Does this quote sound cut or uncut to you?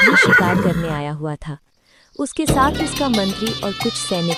uncut